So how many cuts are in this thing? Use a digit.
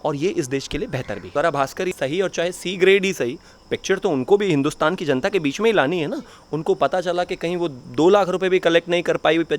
2